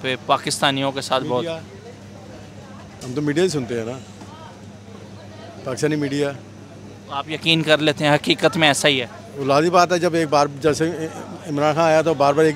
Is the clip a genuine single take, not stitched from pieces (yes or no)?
yes